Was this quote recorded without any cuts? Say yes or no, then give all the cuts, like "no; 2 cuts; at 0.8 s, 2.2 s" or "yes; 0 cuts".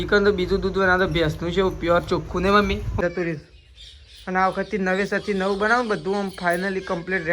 no; 1 cut; at 3.0 s